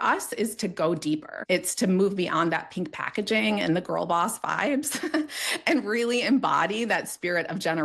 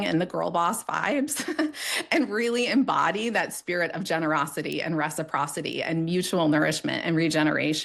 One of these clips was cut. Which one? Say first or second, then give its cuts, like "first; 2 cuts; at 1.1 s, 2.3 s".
first; 1 cut; at 1.3 s